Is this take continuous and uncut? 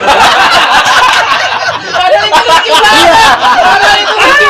yes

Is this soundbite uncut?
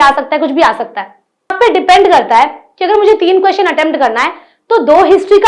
no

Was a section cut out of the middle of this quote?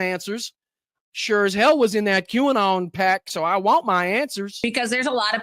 yes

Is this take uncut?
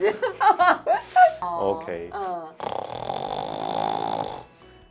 no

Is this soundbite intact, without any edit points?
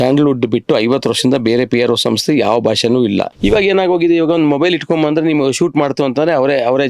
no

